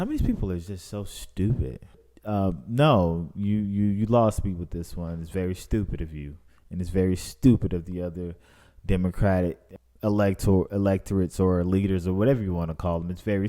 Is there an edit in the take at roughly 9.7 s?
yes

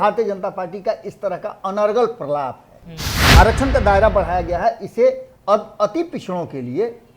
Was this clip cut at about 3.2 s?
yes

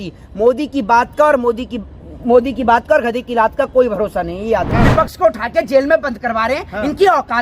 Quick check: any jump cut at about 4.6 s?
yes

